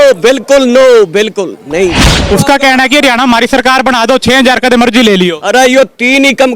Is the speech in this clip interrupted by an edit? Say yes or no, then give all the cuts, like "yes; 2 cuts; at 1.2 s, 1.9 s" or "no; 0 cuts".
yes; 1 cut; at 2.1 s